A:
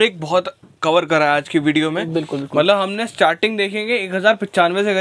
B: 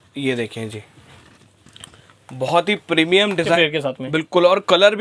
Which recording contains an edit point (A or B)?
B